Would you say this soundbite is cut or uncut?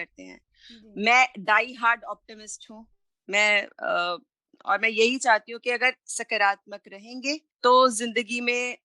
cut